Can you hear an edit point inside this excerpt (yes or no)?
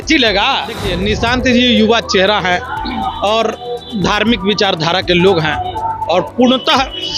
yes